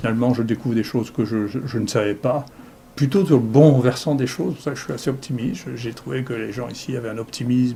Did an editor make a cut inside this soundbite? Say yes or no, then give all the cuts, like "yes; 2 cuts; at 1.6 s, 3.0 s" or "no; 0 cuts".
no; 0 cuts